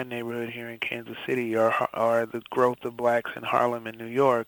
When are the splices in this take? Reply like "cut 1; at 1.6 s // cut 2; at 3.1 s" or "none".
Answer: none